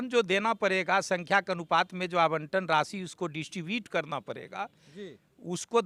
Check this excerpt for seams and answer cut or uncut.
uncut